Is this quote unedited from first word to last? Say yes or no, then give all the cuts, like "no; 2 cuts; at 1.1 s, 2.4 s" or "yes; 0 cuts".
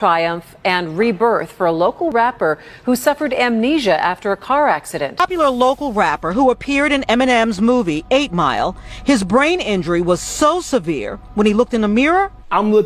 no; 1 cut; at 5.2 s